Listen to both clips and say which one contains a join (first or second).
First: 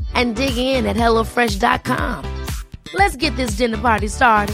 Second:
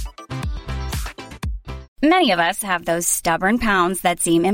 second